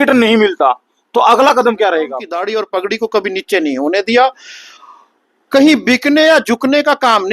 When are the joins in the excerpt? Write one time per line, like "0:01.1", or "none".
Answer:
0:02.3